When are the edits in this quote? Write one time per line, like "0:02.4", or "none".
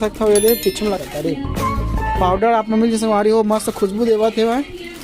0:00.9

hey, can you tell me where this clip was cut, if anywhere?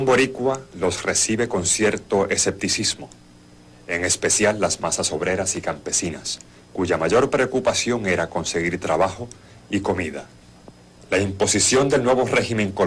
0:03.8

